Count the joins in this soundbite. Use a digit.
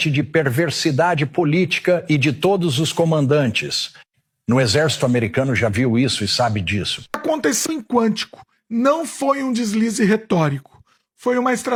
0